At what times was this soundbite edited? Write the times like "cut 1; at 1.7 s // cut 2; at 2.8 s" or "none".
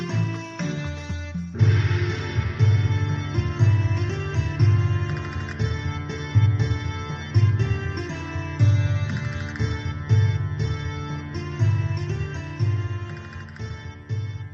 cut 1; at 11.1 s